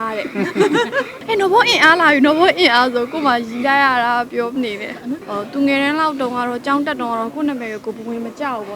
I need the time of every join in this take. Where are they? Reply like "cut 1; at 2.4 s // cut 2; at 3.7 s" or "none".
cut 1; at 1.2 s // cut 2; at 5.2 s